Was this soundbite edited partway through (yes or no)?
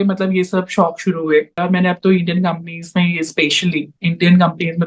yes